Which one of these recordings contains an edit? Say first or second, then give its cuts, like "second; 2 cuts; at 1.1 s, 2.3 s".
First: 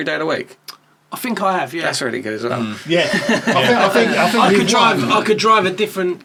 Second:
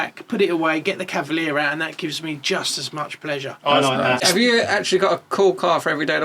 second; 1 cut; at 4.2 s